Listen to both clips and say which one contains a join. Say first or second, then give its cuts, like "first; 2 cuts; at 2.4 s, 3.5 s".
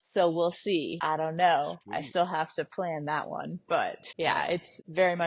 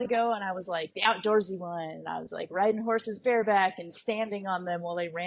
first; 2 cuts; at 0.9 s, 4.4 s